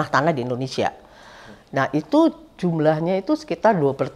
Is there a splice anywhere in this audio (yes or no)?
no